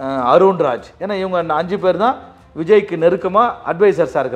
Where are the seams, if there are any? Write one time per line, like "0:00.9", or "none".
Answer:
0:00.9